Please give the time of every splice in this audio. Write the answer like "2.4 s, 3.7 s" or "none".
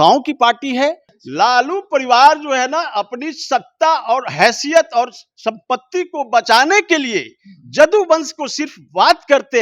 1.1 s